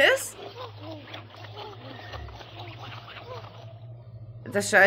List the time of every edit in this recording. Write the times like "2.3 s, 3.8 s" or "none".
none